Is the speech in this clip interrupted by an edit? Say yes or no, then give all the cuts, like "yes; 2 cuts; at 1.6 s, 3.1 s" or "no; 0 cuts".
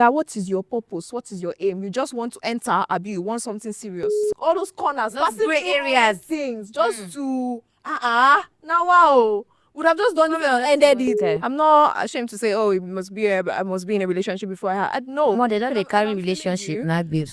yes; 2 cuts; at 4.3 s, 11.3 s